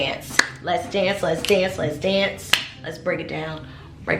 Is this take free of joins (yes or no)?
yes